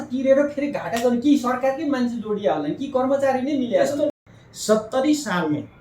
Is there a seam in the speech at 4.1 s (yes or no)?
yes